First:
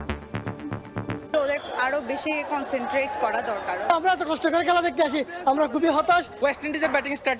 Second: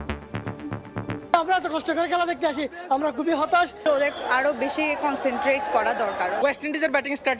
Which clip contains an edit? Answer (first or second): first